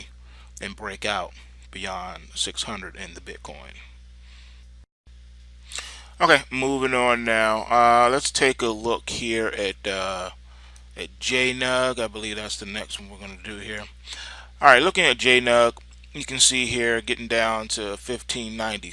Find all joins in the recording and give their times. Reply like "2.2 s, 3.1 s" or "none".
11.2 s